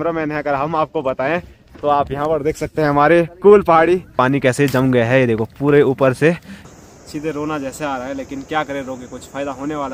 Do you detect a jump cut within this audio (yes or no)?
yes